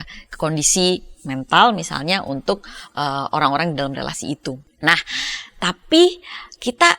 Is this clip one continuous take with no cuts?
no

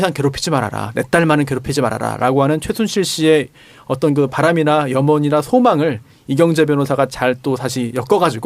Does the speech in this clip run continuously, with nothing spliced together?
no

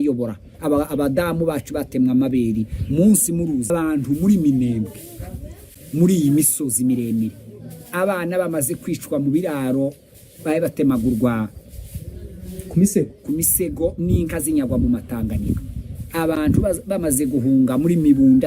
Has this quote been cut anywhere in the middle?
yes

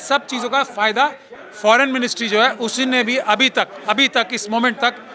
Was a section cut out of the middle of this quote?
yes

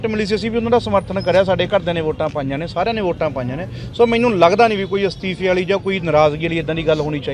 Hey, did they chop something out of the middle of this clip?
no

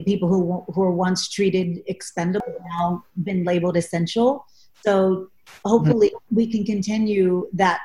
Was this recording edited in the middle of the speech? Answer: yes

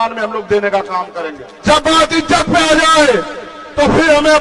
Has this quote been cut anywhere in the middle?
yes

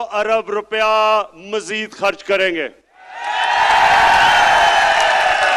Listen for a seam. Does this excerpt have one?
no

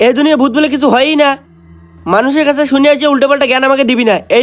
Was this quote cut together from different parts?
no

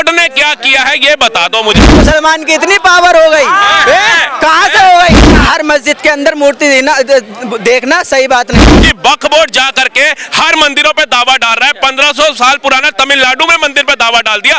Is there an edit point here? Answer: yes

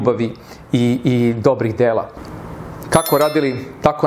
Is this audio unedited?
no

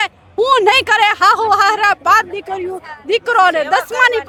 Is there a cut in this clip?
no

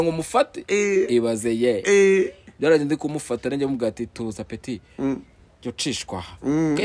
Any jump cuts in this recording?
no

